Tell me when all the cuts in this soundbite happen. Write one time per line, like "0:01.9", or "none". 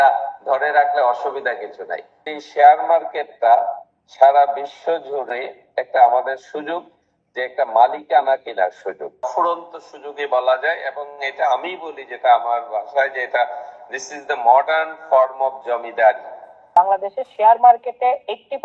0:02.1
0:05.3
0:09.1
0:16.7